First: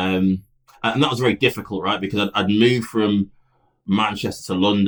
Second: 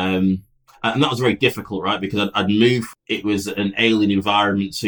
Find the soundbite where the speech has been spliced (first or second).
second